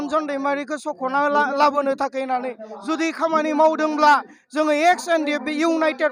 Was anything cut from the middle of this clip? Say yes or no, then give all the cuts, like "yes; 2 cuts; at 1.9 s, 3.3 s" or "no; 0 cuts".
no; 0 cuts